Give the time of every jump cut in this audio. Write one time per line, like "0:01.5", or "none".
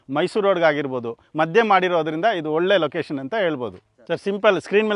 0:03.9